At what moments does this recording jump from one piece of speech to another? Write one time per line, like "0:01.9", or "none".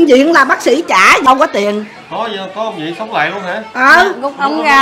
0:01.2